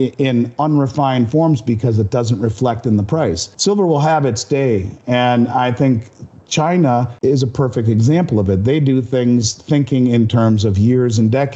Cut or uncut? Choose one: cut